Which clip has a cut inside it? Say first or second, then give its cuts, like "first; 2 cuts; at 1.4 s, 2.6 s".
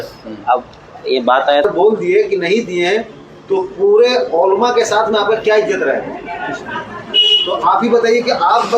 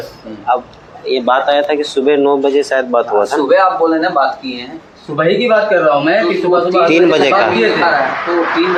first; 1 cut; at 1.6 s